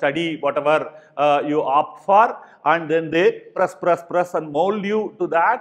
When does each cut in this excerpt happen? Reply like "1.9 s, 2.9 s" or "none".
none